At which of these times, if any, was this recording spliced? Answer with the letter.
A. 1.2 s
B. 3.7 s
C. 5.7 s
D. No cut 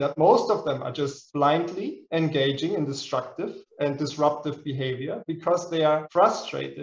D